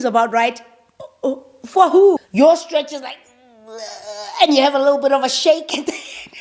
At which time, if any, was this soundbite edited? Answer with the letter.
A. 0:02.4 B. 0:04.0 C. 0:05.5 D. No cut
A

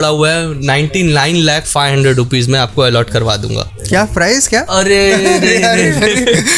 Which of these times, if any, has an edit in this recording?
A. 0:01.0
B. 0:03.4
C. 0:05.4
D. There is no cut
D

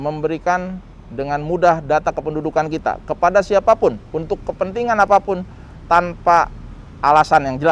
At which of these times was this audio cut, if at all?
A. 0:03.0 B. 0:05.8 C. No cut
C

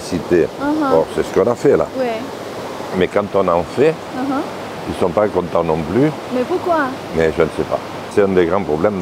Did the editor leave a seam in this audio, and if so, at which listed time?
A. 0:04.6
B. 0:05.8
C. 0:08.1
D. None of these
C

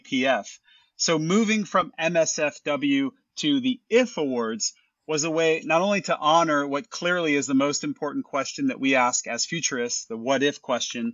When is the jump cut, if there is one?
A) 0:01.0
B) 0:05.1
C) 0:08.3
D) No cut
D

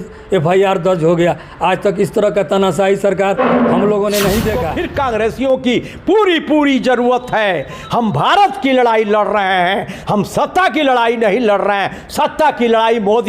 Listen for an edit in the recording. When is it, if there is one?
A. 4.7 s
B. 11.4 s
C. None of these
A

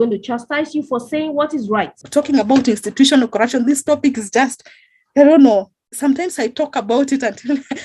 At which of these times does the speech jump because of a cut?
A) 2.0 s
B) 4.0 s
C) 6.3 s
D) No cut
A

